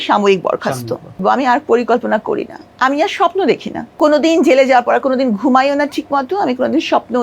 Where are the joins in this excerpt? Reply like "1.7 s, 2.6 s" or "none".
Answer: 1.2 s, 3.8 s